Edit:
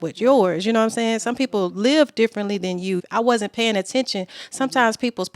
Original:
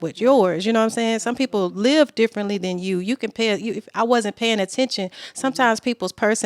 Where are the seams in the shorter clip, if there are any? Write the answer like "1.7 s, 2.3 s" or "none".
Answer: 3.0 s